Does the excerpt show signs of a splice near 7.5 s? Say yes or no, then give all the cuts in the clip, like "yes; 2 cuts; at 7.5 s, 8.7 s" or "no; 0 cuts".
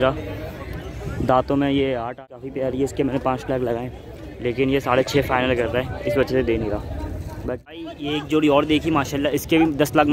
yes; 2 cuts; at 2.3 s, 7.5 s